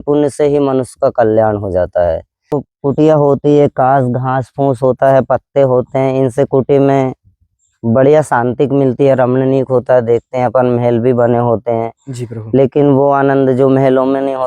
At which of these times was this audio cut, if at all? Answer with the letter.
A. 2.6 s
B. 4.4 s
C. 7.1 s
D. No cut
A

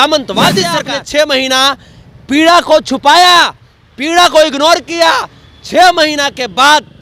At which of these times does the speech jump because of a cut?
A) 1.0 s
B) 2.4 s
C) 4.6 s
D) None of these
A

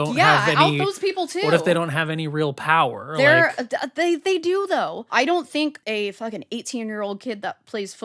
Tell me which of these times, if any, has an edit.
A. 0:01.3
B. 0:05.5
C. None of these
B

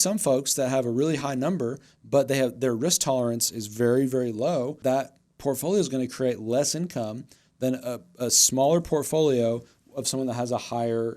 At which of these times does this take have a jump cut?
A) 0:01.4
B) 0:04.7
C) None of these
B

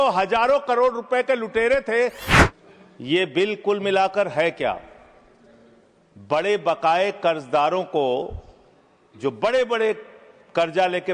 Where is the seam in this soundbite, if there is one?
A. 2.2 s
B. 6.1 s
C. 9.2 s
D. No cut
A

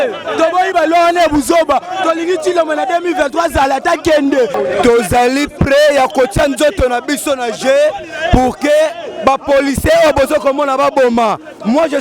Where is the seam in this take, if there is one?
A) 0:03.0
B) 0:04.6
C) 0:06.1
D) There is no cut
B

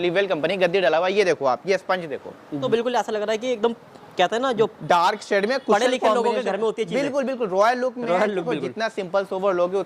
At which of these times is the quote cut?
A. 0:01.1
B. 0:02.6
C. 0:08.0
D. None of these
B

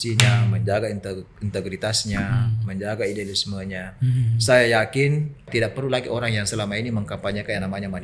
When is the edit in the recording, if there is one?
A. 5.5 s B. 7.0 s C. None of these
A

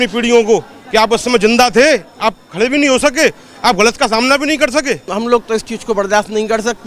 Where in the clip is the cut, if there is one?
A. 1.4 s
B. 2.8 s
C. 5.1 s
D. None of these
C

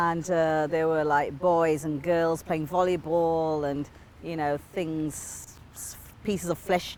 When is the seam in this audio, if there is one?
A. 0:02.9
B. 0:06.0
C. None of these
C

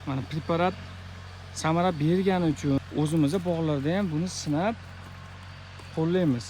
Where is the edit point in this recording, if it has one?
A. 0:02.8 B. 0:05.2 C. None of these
A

